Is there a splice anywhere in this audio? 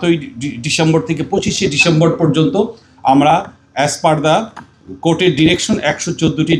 no; 0 cuts

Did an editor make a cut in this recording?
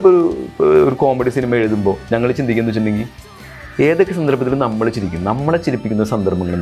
no; 0 cuts

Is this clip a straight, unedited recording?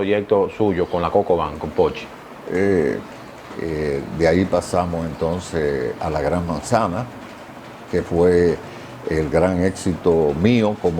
no; 1 cut; at 3.0 s

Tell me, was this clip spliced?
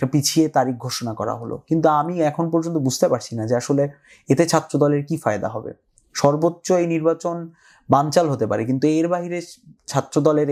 no; 0 cuts

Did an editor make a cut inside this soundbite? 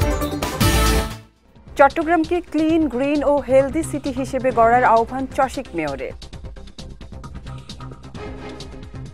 no; 0 cuts

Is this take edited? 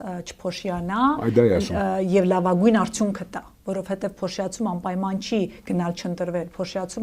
no; 0 cuts

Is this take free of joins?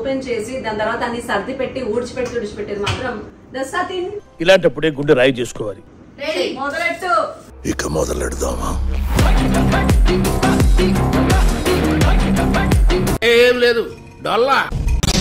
yes; 0 cuts

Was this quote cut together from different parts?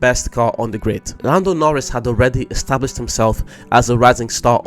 yes; 1 cut; at 1.1 s

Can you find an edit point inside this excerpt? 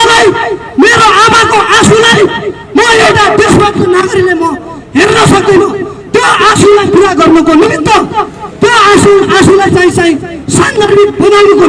no; 0 cuts

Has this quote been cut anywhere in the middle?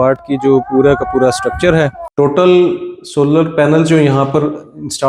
yes; 1 cut; at 2.0 s

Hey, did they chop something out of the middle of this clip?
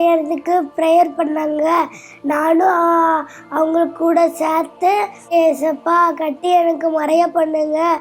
no; 0 cuts

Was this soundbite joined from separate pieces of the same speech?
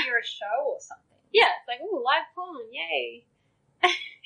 no; 0 cuts

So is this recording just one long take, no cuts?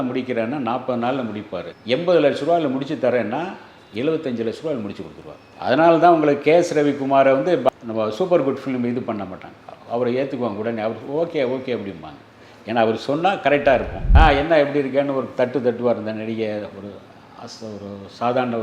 no; 1 cut; at 14.0 s

